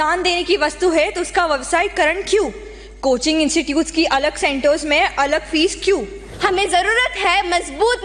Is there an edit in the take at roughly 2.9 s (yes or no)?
no